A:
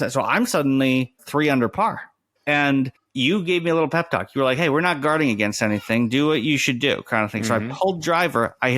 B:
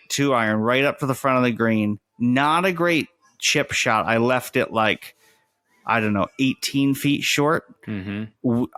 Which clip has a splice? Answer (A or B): A